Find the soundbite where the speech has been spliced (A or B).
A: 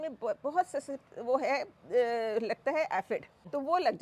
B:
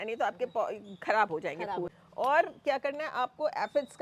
B